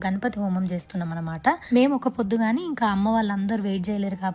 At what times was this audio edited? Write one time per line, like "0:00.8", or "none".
0:01.6